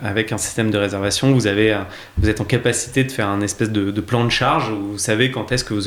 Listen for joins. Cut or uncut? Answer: uncut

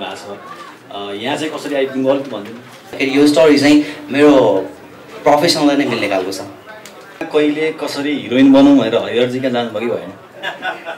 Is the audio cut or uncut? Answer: cut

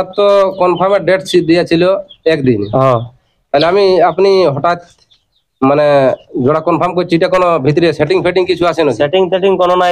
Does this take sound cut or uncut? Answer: uncut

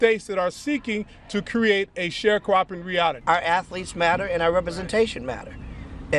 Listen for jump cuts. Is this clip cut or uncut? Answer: cut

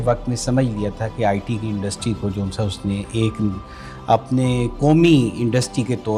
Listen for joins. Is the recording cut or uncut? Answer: uncut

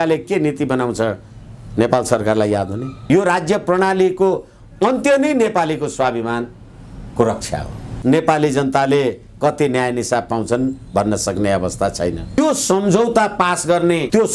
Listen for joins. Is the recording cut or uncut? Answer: cut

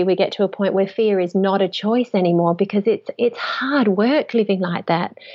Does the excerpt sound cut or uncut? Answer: uncut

